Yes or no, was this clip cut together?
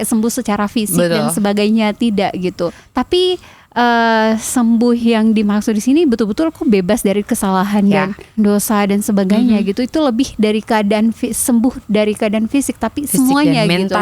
yes